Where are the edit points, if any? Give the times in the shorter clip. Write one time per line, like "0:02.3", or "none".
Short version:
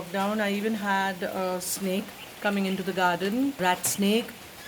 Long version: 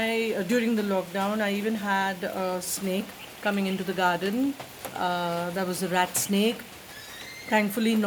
0:03.6